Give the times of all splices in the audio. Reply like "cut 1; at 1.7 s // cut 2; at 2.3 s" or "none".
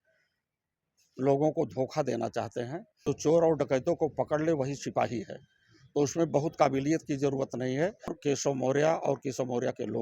cut 1; at 3.0 s // cut 2; at 8.2 s